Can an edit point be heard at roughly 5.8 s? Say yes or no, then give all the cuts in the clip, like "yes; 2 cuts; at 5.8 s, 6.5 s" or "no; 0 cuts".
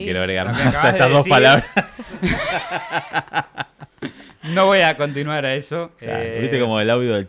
no; 0 cuts